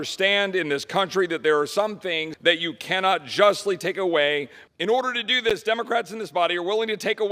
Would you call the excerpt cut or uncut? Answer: uncut